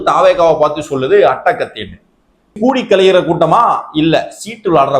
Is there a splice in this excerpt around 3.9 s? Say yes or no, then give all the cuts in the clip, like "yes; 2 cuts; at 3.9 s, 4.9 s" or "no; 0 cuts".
no; 1 cut; at 2.3 s